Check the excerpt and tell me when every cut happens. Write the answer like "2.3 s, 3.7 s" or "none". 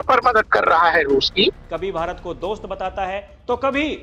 1.6 s